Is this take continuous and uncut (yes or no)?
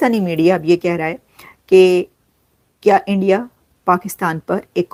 yes